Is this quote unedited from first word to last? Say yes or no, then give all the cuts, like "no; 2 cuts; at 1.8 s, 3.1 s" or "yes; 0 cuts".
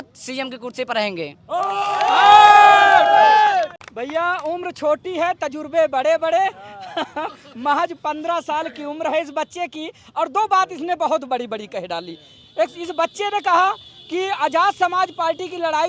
yes; 0 cuts